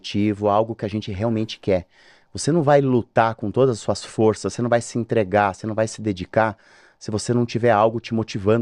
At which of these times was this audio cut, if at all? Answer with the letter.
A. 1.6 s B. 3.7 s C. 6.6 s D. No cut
D